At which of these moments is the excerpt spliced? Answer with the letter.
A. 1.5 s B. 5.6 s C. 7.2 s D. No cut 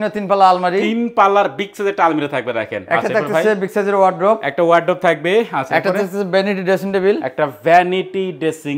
D